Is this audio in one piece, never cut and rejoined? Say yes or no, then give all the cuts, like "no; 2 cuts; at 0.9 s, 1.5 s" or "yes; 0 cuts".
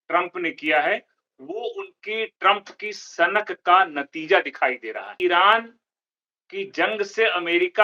no; 1 cut; at 5.1 s